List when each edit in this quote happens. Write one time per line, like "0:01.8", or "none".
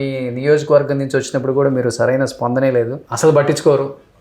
0:03.0